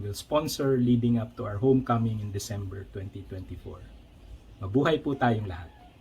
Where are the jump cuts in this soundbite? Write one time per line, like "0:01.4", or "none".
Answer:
0:02.3